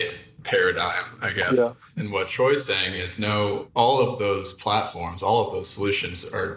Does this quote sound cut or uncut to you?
uncut